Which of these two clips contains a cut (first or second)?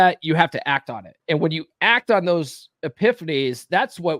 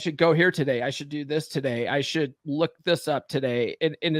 first